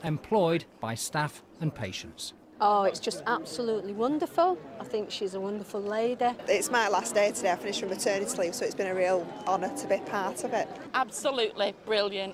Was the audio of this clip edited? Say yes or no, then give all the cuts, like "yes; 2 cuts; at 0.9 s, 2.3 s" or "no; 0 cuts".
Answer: no; 0 cuts